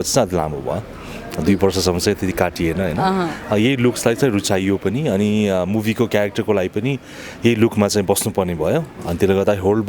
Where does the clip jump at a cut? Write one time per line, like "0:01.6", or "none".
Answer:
none